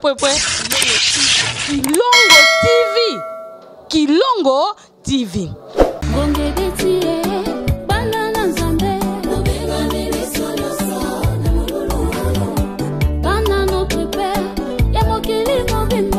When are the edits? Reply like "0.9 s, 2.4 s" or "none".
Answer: 5.9 s